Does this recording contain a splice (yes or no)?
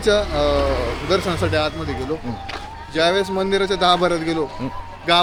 no